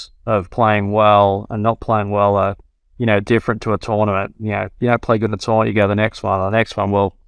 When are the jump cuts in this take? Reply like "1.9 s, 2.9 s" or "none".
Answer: none